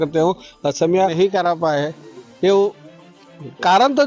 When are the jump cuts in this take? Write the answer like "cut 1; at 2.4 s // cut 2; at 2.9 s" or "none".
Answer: cut 1; at 1.1 s